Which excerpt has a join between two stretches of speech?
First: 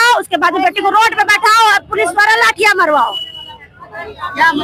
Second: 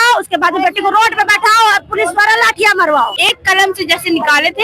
second; 1 cut; at 3.2 s

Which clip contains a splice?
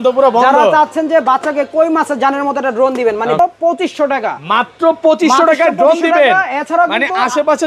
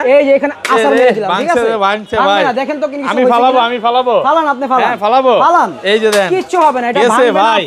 first; 1 cut; at 3.4 s

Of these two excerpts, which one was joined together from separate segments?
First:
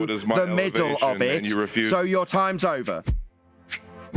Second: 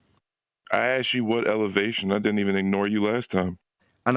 first; 1 cut; at 3.0 s

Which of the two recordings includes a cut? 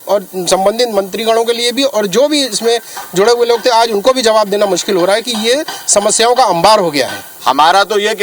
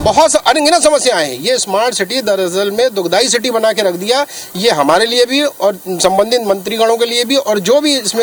first; 1 cut; at 7.2 s

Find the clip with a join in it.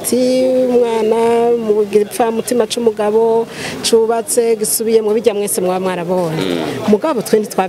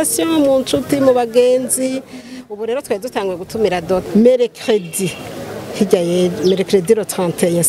second; 1 cut; at 4.0 s

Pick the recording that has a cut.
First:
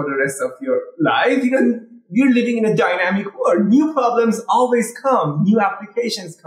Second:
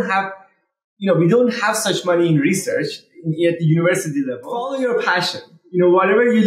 second; 1 cut; at 4.4 s

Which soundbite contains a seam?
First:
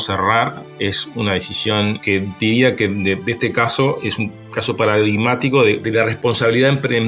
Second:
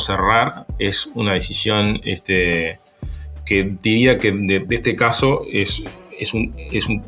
first; 3 cuts; at 2.0 s, 4.0 s, 5.8 s

